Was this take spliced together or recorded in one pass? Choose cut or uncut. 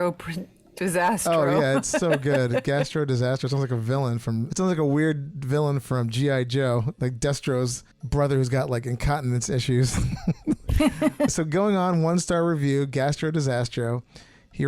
cut